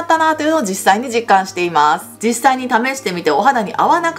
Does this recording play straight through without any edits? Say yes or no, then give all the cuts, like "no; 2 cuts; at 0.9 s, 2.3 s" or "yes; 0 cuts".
no; 1 cut; at 2.1 s